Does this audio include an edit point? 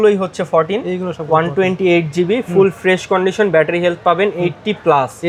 no; 0 cuts

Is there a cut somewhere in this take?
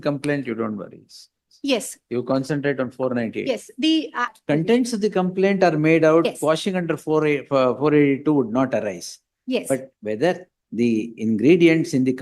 yes; 1 cut; at 4.3 s

